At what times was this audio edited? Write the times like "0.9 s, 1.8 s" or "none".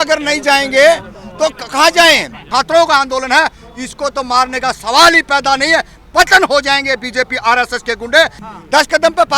2.4 s, 8.4 s